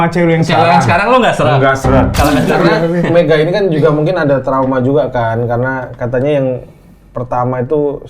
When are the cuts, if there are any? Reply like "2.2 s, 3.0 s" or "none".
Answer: 2.4 s